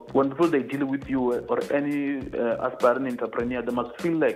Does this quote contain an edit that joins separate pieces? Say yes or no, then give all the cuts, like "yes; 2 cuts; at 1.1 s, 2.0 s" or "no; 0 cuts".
no; 0 cuts